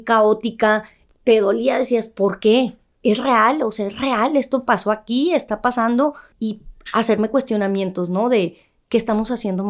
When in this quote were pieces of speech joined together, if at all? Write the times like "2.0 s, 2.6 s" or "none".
1.0 s, 2.9 s, 6.3 s